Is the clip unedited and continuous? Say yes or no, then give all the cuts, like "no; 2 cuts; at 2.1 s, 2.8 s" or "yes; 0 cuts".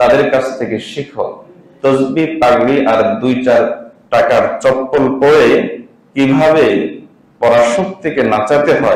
yes; 0 cuts